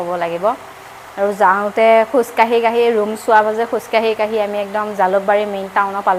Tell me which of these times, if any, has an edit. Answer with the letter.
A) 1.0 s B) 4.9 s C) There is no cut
C